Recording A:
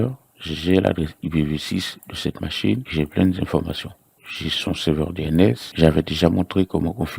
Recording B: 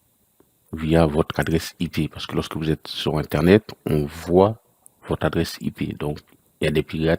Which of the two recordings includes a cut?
A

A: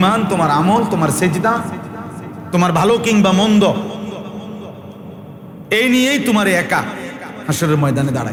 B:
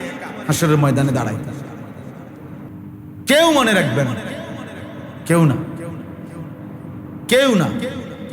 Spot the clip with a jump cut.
B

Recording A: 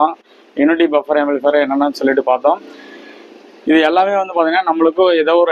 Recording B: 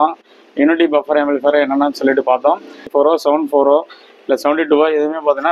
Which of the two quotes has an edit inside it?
B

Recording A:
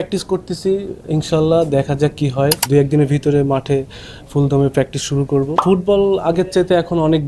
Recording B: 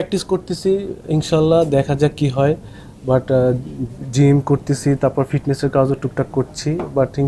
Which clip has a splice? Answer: A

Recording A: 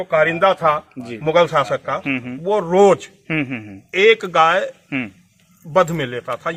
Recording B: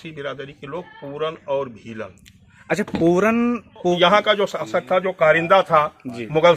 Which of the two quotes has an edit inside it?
B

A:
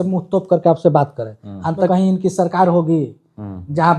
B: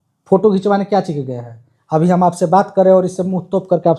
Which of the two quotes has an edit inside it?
A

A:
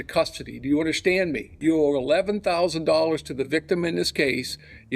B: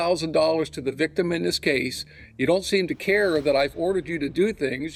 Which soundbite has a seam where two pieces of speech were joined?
A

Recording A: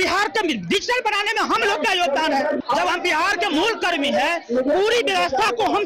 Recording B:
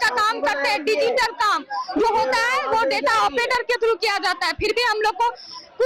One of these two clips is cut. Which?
A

